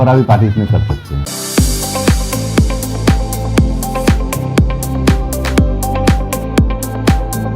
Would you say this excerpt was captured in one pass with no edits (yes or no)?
no